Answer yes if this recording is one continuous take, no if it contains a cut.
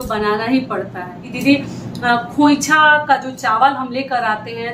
no